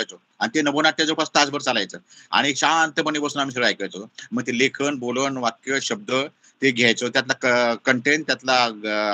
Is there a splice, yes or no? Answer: no